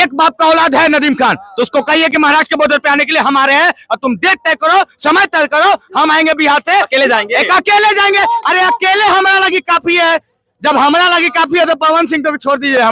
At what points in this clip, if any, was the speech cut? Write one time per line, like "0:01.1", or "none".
none